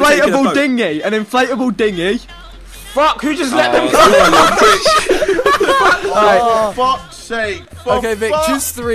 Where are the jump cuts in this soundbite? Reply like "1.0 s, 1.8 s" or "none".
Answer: 5.8 s